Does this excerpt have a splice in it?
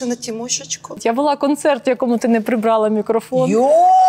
yes; 1 cut; at 1.0 s

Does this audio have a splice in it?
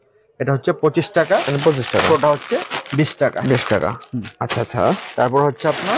no; 0 cuts

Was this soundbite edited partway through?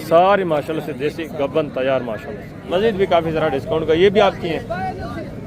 yes; 1 cut; at 2.6 s

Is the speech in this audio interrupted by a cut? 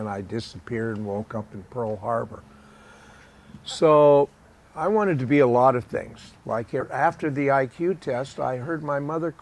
no; 0 cuts

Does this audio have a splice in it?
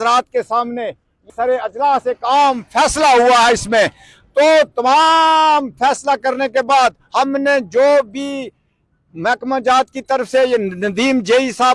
yes; 1 cut; at 1.3 s

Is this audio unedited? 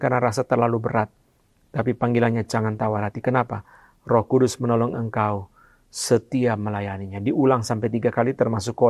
yes; 0 cuts

